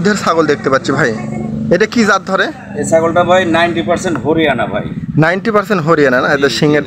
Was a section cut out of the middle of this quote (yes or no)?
no